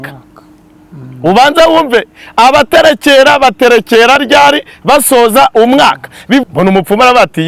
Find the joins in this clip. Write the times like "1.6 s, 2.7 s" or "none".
6.4 s